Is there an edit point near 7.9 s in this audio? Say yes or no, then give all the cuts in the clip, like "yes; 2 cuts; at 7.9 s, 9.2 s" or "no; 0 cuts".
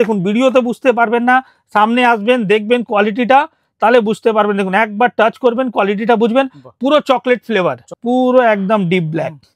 yes; 1 cut; at 7.9 s